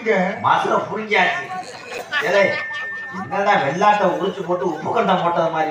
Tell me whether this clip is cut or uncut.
uncut